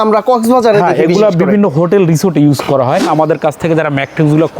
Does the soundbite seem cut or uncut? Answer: cut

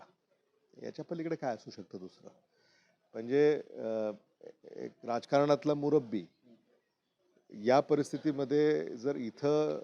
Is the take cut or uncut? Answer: uncut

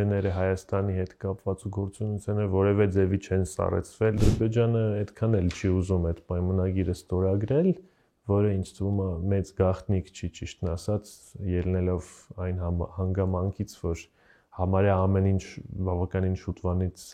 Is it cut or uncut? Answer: cut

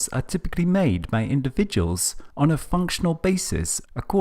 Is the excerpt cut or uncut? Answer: cut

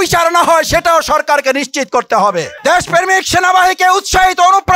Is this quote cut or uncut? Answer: cut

